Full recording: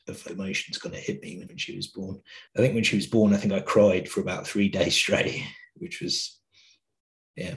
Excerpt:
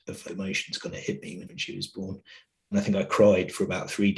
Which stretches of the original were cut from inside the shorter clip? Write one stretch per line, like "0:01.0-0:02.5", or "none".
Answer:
0:02.7-0:03.3